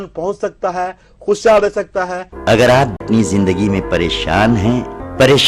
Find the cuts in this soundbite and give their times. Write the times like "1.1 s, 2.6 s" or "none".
2.1 s, 3.0 s